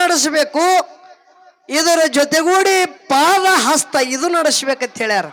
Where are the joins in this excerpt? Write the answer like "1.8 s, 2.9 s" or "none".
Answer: none